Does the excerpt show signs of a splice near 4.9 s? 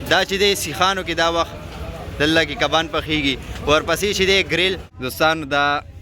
yes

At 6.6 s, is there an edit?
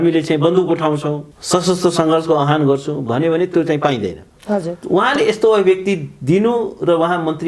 no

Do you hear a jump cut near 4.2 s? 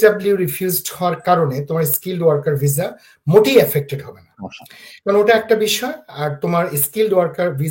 no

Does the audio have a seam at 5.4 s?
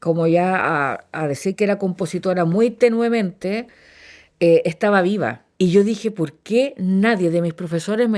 yes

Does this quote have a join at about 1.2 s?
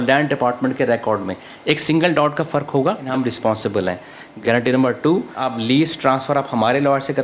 no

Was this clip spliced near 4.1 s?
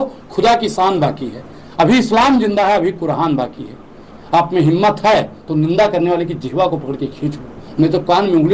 yes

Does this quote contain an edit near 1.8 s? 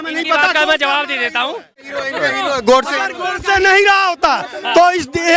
yes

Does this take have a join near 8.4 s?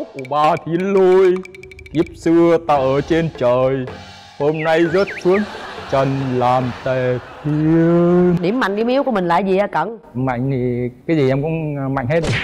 yes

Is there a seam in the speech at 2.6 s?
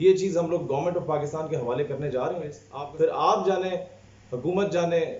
yes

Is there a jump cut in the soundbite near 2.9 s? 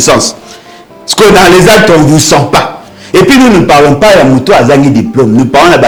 no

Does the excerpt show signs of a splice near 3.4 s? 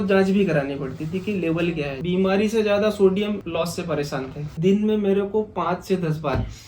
yes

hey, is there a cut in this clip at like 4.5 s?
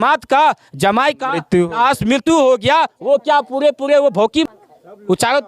yes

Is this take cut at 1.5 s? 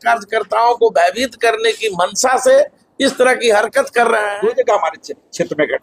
no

